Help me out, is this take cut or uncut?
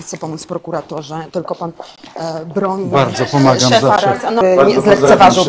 cut